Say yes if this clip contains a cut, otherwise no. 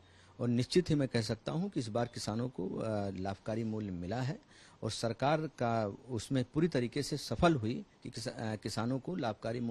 no